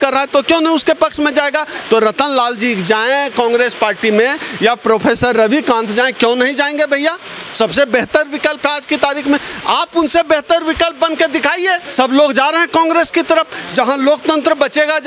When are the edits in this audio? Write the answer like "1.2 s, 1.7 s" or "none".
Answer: 11.9 s

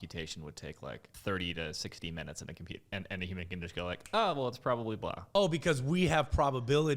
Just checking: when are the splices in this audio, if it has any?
1.1 s, 5.4 s

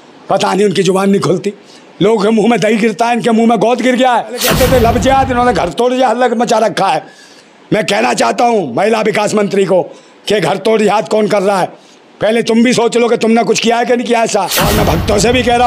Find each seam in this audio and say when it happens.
4.5 s, 14.6 s

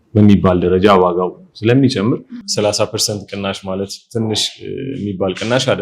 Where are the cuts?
2.3 s

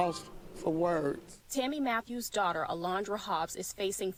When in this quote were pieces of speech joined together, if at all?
none

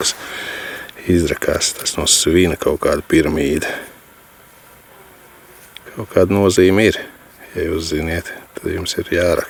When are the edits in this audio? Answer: none

